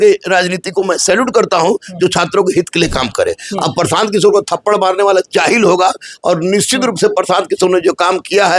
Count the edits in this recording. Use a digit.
0